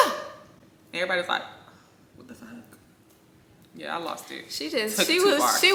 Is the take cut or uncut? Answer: uncut